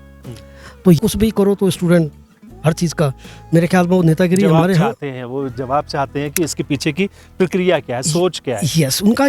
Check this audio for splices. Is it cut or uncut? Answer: cut